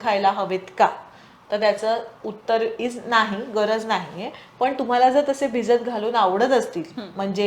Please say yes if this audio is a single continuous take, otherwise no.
yes